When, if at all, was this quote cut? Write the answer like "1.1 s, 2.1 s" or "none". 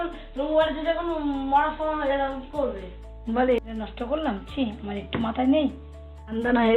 none